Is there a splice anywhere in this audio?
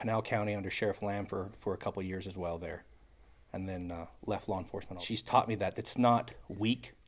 yes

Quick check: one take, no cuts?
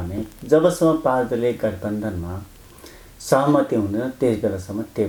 yes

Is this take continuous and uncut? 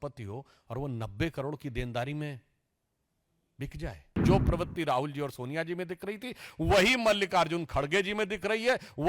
no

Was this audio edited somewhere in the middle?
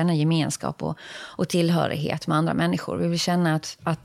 no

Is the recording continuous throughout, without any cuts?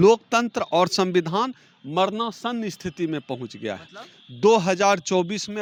yes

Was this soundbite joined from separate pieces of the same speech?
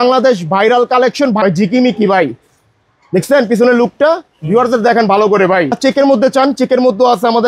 yes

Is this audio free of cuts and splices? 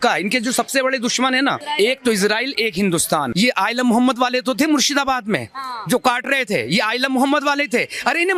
no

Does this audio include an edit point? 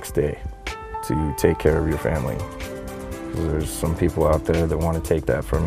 no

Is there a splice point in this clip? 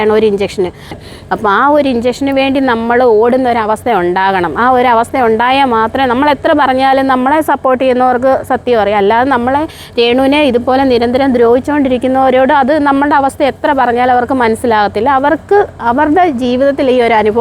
yes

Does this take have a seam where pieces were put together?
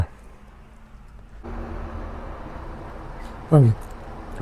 yes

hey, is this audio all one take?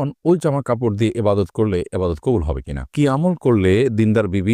no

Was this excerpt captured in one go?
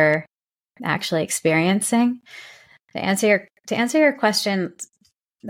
yes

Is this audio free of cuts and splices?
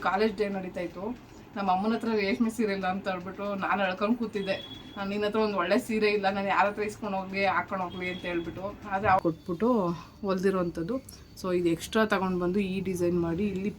no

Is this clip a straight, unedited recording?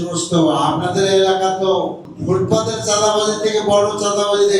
no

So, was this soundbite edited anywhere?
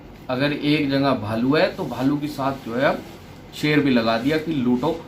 no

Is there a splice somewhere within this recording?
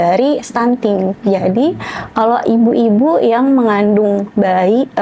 no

